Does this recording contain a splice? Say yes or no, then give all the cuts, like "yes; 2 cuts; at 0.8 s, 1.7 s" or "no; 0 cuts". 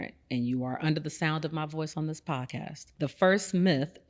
yes; 1 cut; at 2.8 s